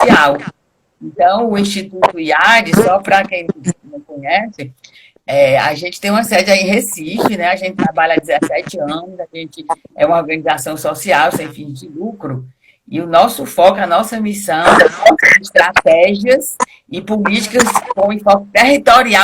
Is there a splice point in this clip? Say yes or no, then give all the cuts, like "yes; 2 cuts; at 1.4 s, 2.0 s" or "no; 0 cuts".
no; 0 cuts